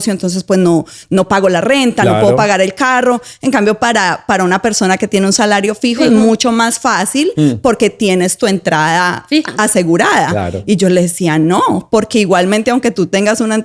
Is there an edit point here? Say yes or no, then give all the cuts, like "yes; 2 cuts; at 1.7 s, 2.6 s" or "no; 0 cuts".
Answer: no; 0 cuts